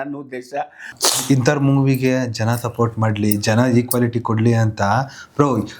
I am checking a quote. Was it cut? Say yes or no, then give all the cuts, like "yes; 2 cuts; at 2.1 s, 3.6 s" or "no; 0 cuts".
yes; 1 cut; at 0.9 s